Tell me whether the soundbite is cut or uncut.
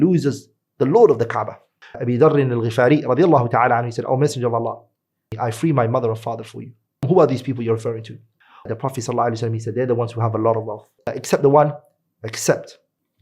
cut